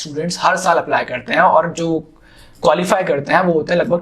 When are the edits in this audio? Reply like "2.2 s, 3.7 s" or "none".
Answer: none

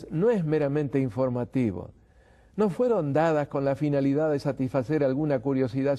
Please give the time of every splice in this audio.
4.7 s

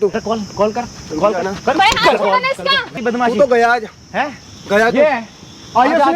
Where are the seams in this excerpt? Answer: 2.9 s

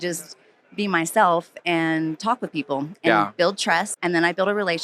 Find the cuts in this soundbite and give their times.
3.9 s

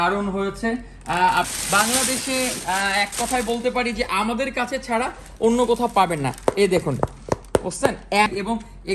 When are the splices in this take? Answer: 1.5 s, 8.3 s

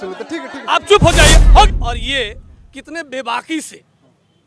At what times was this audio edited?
1.7 s

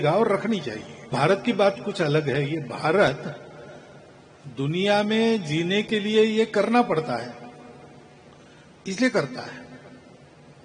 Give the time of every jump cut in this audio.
1.1 s

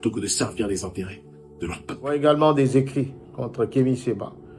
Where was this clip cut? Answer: 2.1 s

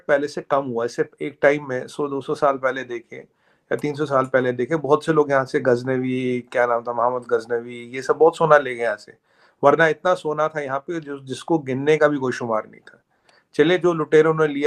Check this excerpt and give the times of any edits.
none

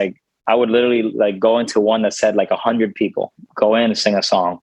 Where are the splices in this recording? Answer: 3.4 s

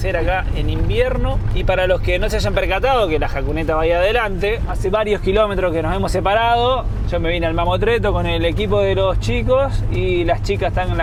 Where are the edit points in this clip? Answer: none

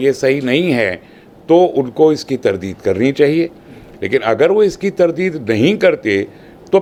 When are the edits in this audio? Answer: none

